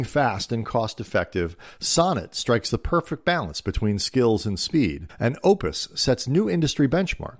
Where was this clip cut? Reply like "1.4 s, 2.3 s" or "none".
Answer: none